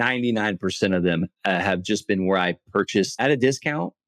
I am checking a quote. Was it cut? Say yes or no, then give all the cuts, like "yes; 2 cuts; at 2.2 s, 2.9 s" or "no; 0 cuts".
yes; 1 cut; at 3.1 s